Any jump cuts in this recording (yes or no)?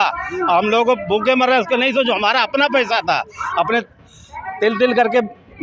no